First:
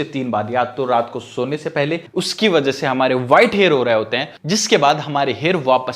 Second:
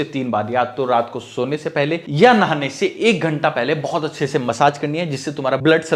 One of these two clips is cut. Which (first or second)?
first